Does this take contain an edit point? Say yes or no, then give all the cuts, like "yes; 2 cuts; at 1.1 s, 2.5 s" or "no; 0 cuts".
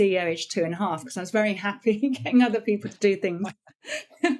no; 0 cuts